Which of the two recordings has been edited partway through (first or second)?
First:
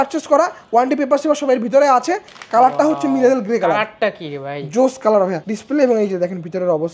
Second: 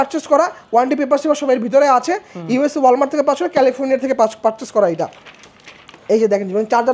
first